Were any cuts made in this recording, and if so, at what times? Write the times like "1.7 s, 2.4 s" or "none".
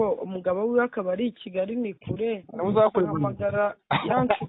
none